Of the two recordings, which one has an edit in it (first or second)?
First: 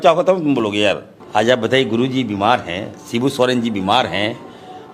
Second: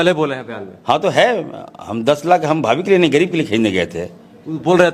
first